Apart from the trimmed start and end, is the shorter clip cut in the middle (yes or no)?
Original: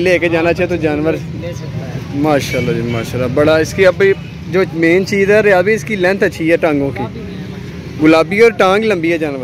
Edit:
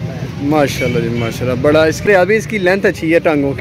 yes